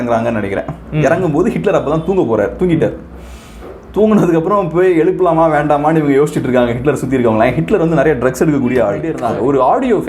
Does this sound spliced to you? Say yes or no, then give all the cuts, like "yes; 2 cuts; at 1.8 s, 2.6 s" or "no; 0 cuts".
yes; 1 cut; at 9.1 s